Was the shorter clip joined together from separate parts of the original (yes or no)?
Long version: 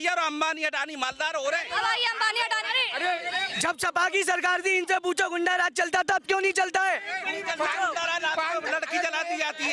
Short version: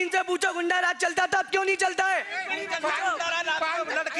no